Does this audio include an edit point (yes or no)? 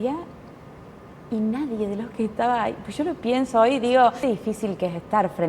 yes